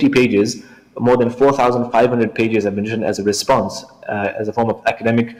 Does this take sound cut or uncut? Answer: uncut